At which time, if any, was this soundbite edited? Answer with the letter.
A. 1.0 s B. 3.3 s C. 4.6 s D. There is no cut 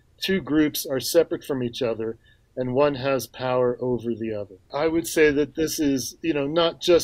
C